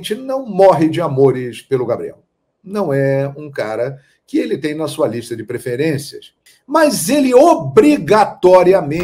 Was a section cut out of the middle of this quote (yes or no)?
no